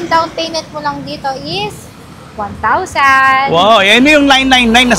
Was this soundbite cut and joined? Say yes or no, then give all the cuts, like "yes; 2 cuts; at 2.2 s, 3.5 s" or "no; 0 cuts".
no; 0 cuts